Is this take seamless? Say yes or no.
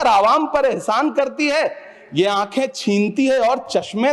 yes